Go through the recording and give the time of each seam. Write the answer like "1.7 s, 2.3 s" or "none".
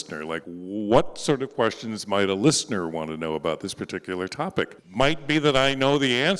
4.8 s